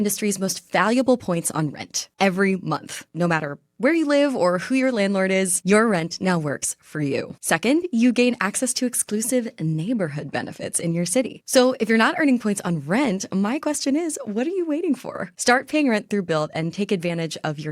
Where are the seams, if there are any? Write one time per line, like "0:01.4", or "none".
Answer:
0:11.4